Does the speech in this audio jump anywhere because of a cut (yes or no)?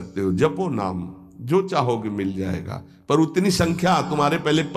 no